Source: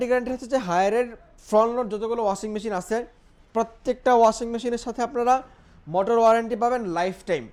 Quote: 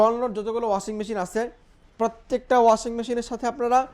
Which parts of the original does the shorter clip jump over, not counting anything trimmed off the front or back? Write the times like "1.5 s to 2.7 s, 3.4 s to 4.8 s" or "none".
none